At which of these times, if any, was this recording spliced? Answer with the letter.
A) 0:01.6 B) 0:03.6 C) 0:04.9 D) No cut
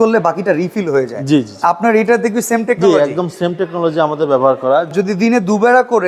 C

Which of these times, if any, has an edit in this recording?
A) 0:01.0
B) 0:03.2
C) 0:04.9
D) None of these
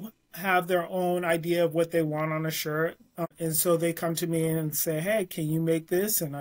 B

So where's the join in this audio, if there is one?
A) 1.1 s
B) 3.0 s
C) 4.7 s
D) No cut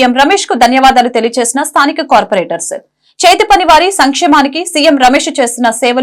D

